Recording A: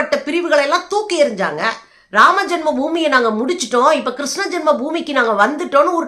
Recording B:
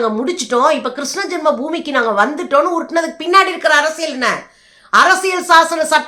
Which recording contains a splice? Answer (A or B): A